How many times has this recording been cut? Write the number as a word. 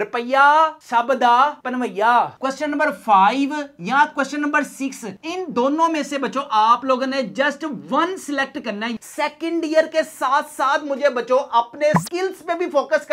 two